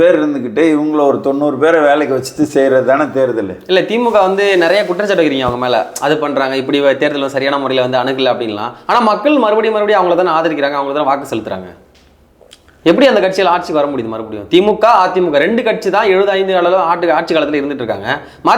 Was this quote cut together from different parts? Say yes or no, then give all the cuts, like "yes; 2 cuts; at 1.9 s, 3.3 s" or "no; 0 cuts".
no; 0 cuts